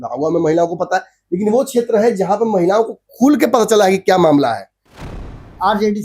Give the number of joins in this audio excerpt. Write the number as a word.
one